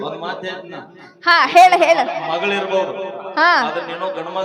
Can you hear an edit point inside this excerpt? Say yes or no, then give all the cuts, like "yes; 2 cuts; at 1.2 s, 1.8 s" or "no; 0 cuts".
no; 0 cuts